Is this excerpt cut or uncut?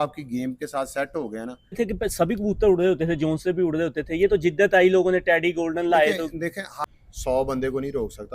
cut